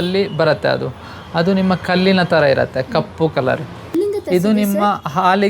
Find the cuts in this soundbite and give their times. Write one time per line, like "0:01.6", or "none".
0:04.0